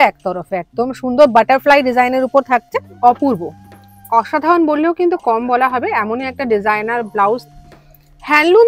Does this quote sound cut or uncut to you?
cut